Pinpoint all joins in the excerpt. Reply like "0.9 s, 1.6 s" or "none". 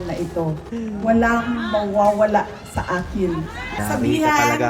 3.8 s